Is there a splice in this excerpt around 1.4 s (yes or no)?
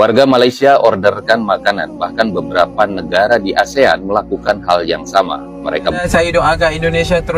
no